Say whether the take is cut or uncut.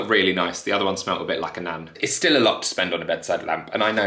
cut